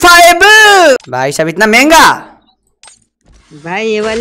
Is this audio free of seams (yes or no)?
no